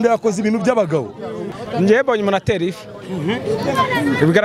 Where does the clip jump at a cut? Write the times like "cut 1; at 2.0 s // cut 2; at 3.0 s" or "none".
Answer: cut 1; at 1.5 s